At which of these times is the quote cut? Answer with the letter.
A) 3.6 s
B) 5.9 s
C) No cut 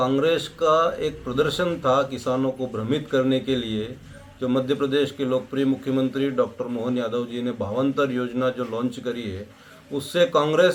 C